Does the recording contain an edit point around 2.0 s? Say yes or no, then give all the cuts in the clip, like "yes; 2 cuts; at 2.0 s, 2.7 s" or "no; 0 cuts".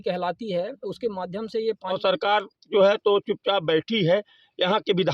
yes; 1 cut; at 2.0 s